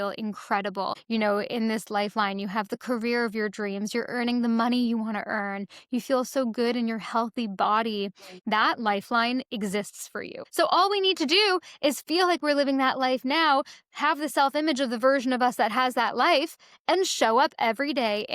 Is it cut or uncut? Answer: cut